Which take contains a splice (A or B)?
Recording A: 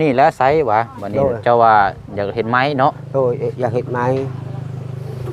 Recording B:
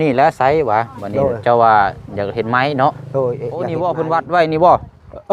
B